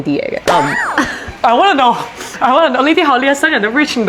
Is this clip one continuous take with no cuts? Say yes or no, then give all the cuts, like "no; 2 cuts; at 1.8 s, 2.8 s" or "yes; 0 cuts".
yes; 0 cuts